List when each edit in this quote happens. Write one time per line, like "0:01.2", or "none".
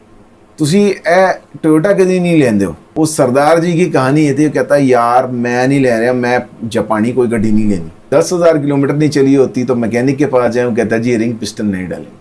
0:02.8
0:08.0